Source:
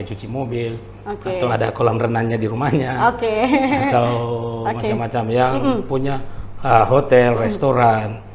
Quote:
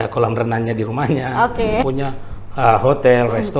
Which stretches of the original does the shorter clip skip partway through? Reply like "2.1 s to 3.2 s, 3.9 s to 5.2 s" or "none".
3.5 s to 5.9 s